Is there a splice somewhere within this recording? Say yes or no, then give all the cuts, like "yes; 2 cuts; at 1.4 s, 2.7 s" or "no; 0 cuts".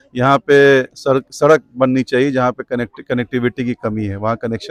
no; 0 cuts